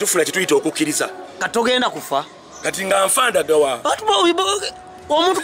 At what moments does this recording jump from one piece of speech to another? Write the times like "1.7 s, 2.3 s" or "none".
1.3 s